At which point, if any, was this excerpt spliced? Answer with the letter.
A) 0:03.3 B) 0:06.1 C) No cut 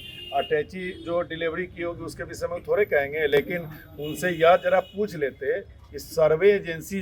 C